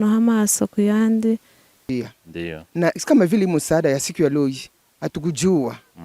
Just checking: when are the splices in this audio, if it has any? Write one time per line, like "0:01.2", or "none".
0:01.9

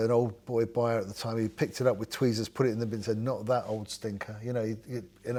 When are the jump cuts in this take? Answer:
none

